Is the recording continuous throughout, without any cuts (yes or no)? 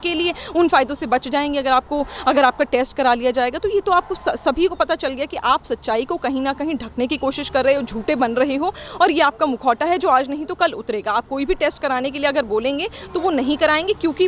yes